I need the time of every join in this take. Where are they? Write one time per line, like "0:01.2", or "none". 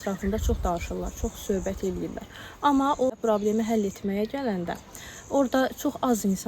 0:03.2